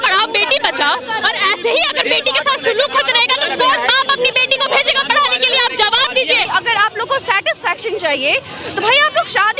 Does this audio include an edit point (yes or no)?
yes